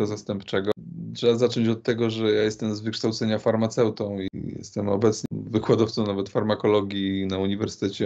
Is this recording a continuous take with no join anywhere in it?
no; 3 cuts; at 0.7 s, 4.3 s, 5.2 s

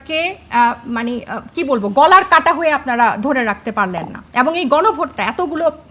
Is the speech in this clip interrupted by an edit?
no; 0 cuts

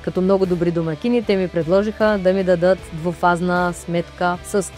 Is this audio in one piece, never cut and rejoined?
yes; 0 cuts

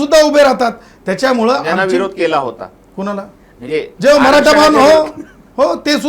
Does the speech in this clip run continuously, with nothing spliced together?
yes; 0 cuts

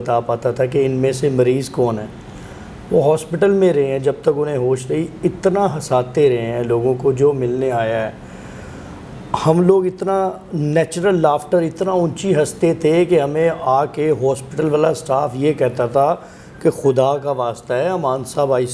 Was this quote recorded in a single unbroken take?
yes; 0 cuts

